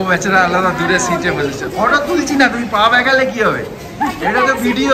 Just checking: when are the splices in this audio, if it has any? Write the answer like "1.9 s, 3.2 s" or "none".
none

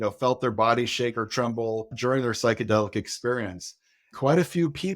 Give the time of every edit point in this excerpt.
1.9 s, 4.1 s

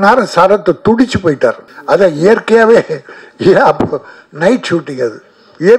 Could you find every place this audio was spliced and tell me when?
1.7 s

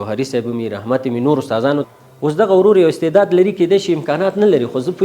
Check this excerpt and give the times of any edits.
1.8 s

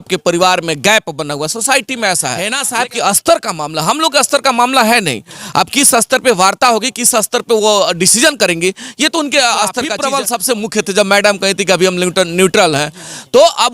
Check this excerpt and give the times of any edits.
2.6 s, 10.0 s

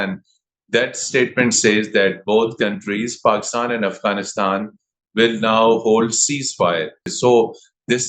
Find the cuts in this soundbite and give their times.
7.1 s

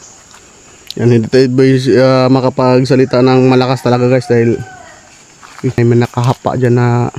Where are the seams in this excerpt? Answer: 5.8 s

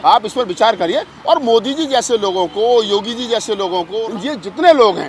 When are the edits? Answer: 4.0 s

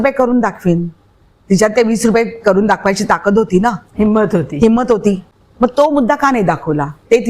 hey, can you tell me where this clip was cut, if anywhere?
5.3 s

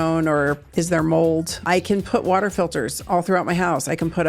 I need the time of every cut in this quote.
1.6 s

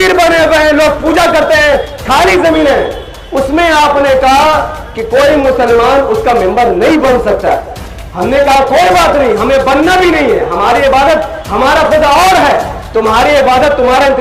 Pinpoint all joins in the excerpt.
none

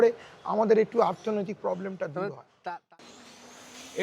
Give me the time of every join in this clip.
2.5 s

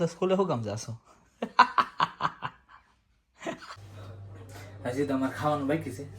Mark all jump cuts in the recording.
3.7 s

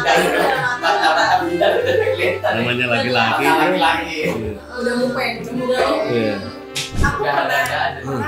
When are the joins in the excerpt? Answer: 7.0 s

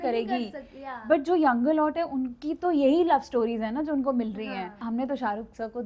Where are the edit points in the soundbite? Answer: 4.8 s

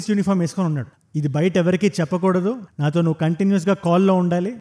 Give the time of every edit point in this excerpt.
0.9 s

